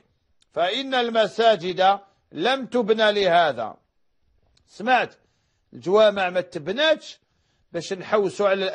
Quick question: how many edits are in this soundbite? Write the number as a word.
one